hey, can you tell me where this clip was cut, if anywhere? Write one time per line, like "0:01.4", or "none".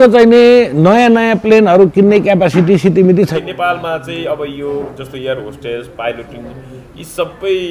0:03.3